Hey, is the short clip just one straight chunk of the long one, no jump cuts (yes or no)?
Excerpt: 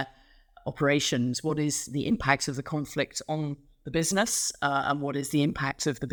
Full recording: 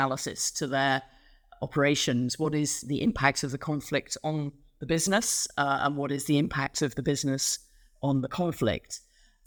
yes